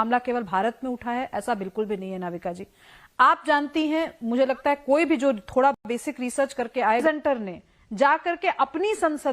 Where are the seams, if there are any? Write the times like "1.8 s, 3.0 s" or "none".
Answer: 7.0 s